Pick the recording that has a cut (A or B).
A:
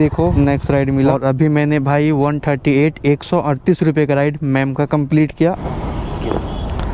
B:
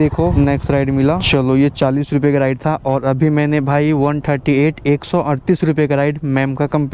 A